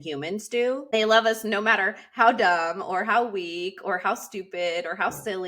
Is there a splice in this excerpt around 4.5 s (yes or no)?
no